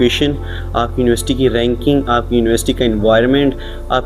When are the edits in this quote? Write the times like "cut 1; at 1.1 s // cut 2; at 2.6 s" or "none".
none

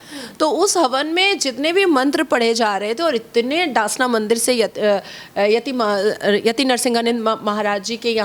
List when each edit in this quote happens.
none

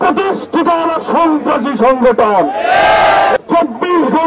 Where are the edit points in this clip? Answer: cut 1; at 3.4 s

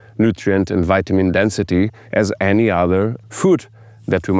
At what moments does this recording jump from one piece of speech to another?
cut 1; at 3.2 s

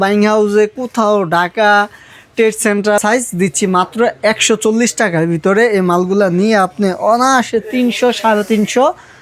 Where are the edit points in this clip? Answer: cut 1; at 3.0 s

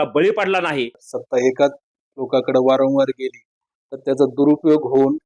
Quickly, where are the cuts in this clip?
cut 1; at 1.0 s

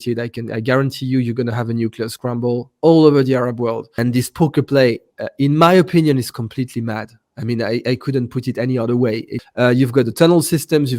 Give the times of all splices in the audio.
cut 1; at 3.9 s // cut 2; at 9.4 s

